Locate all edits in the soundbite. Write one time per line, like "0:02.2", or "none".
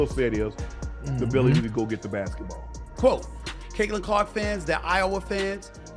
none